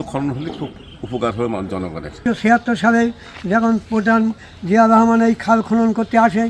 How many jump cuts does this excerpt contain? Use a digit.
0